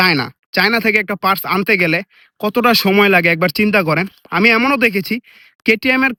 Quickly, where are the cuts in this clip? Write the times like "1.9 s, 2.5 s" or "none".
none